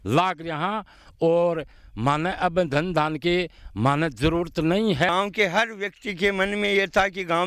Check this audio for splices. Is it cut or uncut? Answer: cut